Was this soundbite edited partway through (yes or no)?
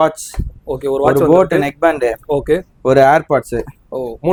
no